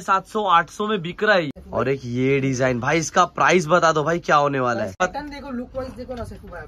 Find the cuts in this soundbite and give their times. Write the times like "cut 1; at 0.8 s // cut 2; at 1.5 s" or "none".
cut 1; at 1.6 s // cut 2; at 5.0 s